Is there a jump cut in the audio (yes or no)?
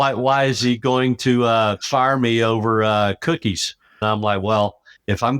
yes